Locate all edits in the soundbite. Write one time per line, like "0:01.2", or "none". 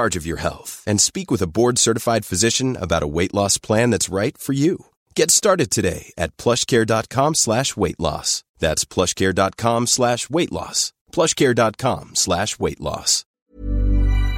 0:13.3